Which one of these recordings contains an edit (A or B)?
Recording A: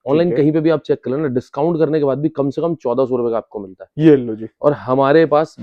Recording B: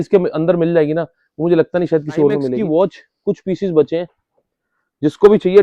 B